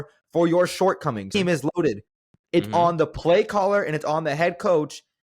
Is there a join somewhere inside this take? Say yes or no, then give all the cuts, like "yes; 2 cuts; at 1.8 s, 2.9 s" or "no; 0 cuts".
yes; 1 cut; at 1.3 s